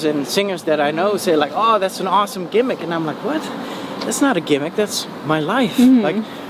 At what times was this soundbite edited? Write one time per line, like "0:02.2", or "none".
none